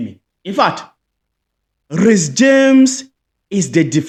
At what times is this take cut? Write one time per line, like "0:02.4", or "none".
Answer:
none